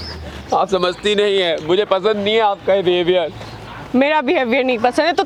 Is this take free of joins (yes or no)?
yes